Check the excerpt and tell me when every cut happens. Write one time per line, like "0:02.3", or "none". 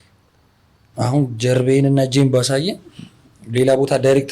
0:00.9

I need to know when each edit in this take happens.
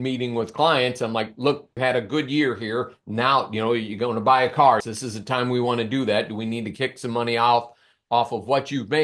0:01.7
0:04.9

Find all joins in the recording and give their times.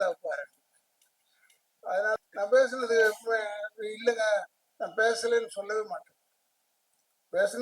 0:02.2

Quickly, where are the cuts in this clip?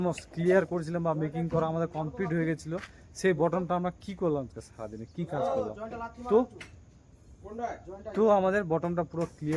none

